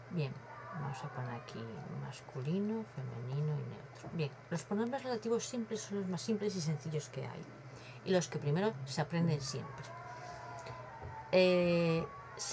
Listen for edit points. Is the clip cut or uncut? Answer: uncut